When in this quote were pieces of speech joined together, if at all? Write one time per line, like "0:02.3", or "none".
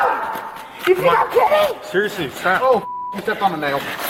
none